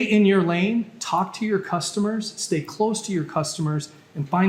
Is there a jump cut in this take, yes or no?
no